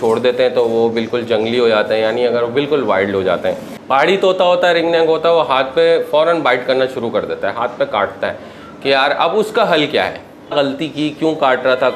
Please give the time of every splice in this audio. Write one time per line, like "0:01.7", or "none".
0:03.7
0:10.5